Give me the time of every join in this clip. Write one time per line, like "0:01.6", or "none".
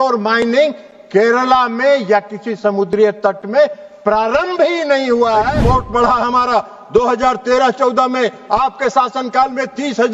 0:05.6